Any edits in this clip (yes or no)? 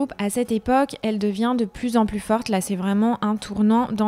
no